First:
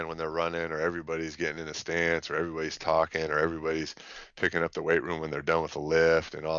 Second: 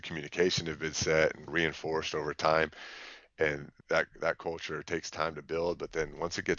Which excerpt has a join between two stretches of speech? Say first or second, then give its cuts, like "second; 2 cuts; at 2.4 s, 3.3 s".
second; 2 cuts; at 1.5 s, 3.7 s